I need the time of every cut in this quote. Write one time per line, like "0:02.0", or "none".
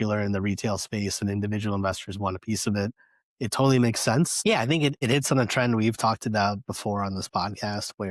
0:04.8

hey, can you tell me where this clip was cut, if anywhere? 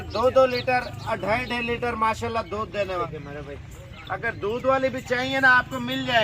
0:03.0

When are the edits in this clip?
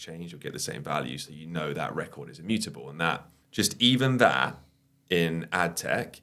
0:03.3

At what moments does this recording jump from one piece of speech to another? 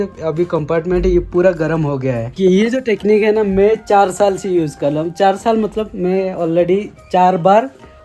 0:02.3

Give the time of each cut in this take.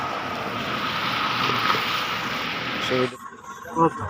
0:03.1

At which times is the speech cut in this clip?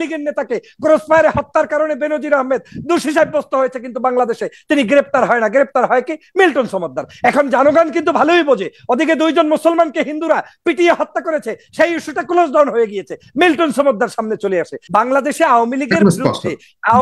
0:14.8

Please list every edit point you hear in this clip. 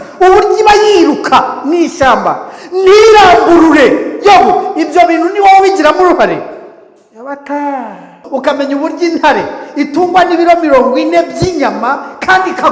0:08.2

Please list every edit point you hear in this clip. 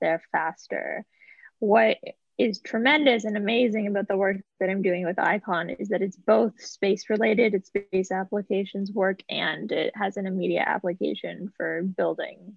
none

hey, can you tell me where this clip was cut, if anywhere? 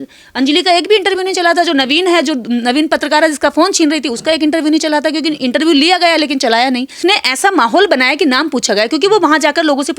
0:07.0

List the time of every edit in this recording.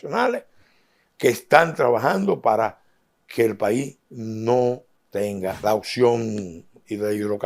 0:05.6

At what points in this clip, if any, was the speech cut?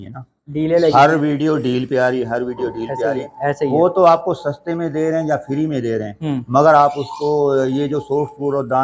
none

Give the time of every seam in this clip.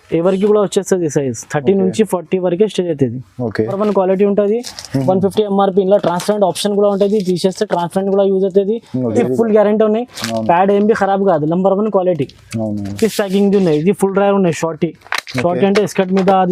0:03.8
0:09.1
0:12.9

